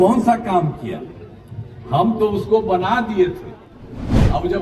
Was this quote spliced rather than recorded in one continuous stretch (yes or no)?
no